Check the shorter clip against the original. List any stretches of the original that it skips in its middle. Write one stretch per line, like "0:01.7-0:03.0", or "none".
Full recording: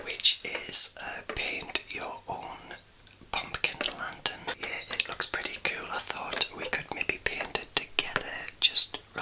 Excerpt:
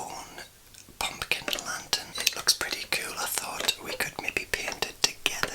0:04.4-0:04.8